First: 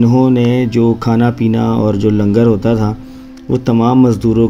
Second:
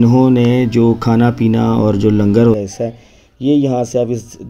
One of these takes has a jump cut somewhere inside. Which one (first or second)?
second